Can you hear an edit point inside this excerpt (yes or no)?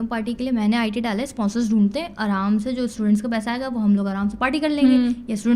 no